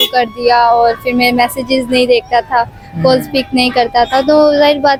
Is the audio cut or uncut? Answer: uncut